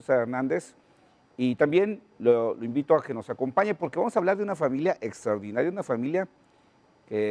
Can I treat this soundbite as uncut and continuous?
yes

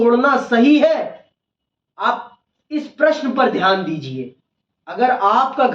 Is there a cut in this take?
no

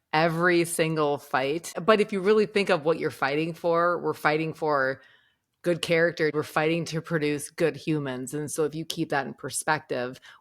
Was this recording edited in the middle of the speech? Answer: yes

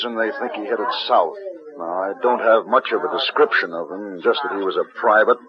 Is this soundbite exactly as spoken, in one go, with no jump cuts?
yes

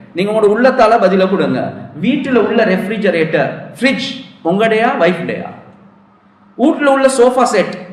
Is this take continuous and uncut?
yes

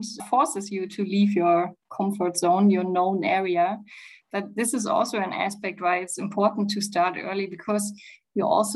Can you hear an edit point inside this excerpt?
no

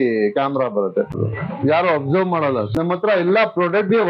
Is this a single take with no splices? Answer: no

